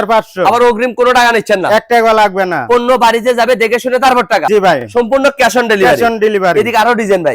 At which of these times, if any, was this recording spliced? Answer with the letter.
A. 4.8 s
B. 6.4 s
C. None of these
C